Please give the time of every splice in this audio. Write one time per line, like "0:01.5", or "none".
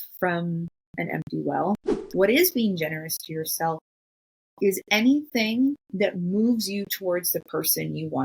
0:02.0